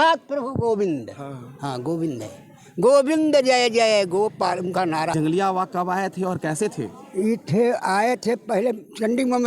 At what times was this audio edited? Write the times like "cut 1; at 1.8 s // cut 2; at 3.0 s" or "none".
cut 1; at 5.1 s

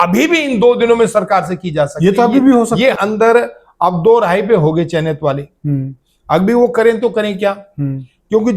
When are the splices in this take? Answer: cut 1; at 3.0 s

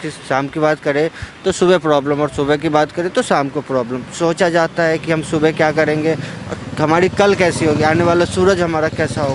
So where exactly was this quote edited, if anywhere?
none

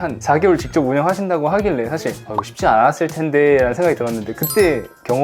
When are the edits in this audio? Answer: cut 1; at 2.2 s

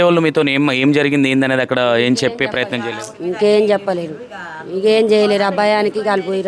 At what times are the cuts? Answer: none

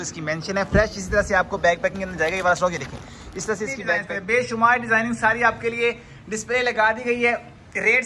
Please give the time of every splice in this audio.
cut 1; at 4.0 s

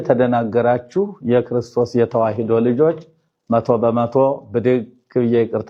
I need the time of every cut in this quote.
none

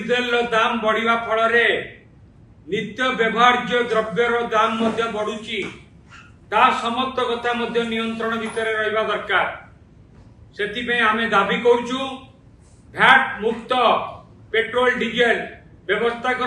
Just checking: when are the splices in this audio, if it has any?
none

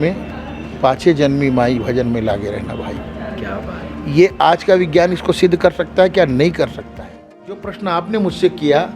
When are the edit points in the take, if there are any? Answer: cut 1; at 7.7 s

